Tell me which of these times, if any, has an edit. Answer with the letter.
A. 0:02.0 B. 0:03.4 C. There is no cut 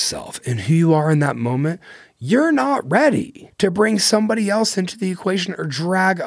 B